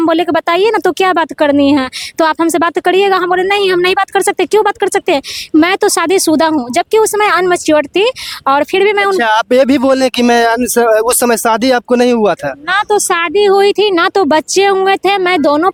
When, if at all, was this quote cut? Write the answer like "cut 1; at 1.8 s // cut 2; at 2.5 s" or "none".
none